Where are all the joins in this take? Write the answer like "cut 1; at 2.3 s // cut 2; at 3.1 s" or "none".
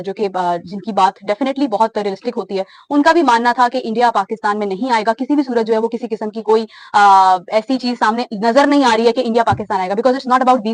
none